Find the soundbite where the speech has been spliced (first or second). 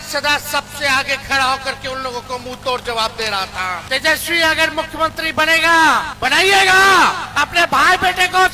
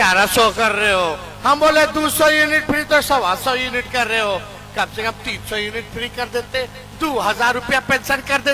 first